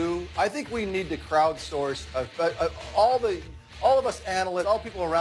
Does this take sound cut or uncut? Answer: cut